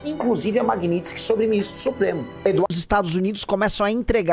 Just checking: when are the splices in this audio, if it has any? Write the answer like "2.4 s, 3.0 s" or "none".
2.8 s